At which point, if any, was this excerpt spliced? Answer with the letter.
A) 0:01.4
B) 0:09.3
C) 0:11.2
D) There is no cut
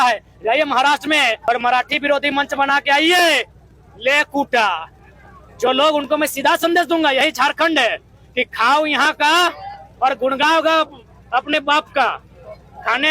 A